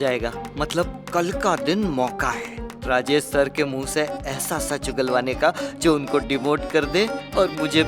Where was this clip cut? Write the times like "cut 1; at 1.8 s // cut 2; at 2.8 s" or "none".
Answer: none